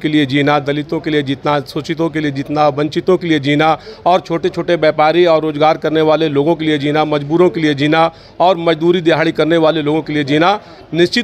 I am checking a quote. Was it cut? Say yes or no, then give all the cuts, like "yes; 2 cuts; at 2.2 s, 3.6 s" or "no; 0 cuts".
no; 0 cuts